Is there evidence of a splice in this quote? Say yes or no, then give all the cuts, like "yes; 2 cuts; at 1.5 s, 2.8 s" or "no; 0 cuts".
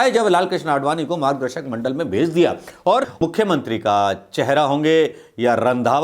yes; 1 cut; at 3.1 s